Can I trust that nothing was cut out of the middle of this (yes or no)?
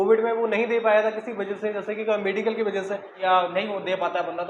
no